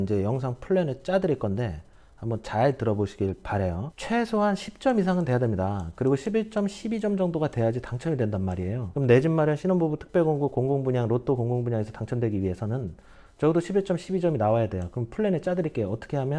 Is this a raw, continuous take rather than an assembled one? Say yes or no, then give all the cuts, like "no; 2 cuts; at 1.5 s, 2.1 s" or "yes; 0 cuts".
yes; 0 cuts